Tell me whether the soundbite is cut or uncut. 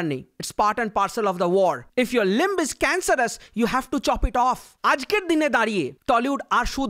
cut